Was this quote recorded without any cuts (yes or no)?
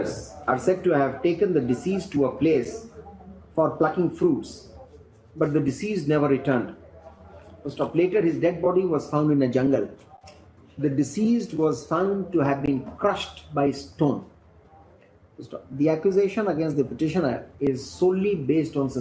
yes